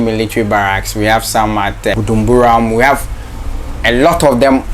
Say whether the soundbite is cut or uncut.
cut